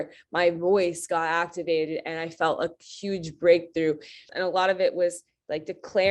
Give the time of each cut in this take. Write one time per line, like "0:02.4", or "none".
0:04.3